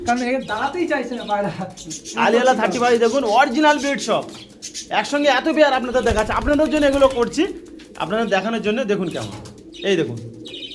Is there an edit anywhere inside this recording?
no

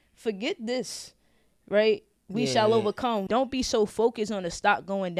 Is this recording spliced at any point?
yes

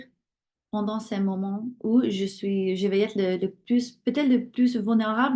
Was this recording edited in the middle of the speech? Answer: no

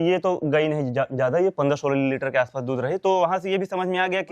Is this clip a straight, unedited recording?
yes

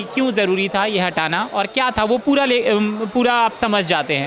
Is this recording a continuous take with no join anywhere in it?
yes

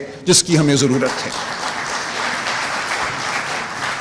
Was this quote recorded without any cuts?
yes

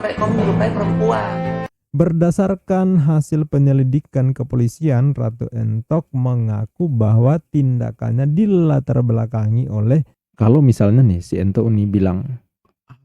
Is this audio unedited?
no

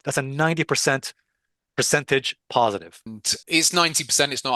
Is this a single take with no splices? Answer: no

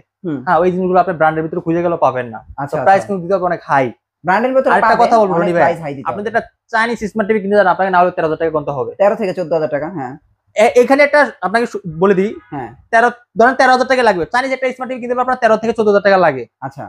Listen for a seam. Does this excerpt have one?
no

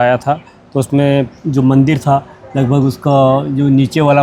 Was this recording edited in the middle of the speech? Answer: no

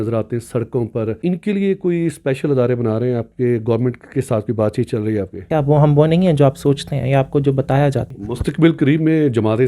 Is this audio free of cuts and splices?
no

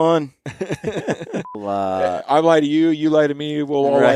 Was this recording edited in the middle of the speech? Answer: yes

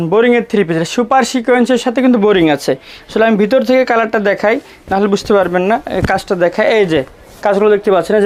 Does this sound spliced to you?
no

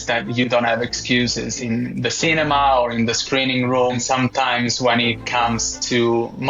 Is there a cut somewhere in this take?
yes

